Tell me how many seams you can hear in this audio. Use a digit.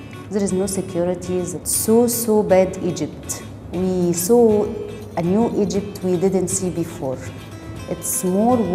0